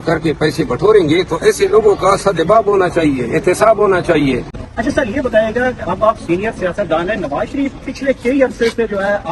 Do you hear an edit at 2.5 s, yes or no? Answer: no